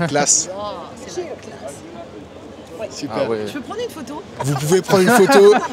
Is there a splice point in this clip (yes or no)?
no